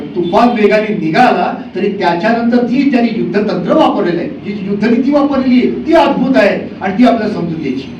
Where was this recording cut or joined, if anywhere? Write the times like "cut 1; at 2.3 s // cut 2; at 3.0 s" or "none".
none